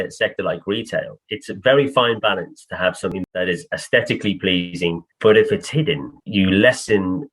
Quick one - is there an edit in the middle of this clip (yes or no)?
yes